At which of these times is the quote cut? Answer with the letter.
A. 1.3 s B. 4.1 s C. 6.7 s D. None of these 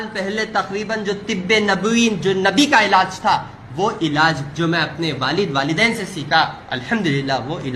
C